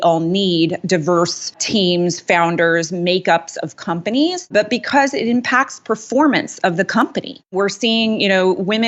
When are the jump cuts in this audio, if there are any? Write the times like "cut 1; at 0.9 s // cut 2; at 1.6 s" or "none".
cut 1; at 1.6 s // cut 2; at 4.5 s // cut 3; at 7.5 s